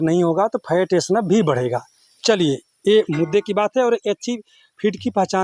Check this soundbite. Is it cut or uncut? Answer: uncut